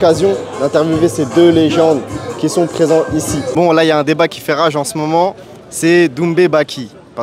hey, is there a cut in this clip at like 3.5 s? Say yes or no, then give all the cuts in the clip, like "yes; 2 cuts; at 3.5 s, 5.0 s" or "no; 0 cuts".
yes; 1 cut; at 3.5 s